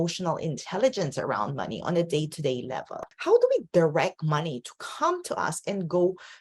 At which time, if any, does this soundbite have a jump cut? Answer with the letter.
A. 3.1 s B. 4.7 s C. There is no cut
A